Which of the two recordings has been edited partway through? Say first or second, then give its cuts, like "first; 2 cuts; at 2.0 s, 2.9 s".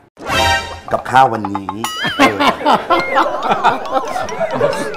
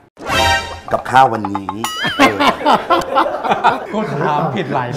second; 1 cut; at 3.8 s